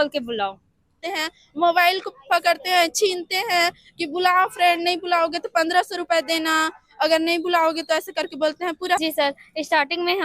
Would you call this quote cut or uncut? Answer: cut